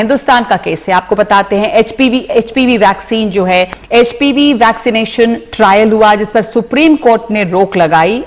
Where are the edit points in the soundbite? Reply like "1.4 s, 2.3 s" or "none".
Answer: 3.8 s